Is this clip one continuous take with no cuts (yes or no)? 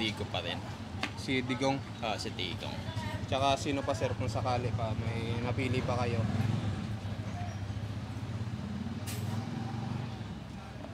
yes